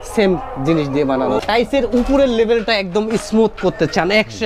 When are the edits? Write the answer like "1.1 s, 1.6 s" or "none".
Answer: 1.4 s